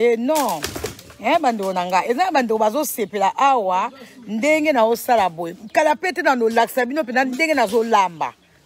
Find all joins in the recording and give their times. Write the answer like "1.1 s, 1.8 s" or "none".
none